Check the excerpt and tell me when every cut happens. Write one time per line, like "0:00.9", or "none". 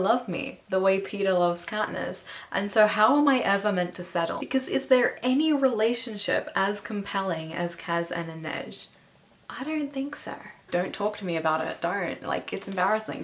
0:04.4
0:10.6